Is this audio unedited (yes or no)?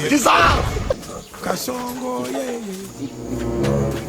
no